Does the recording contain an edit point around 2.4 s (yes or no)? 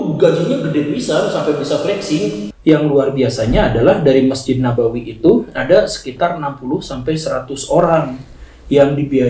yes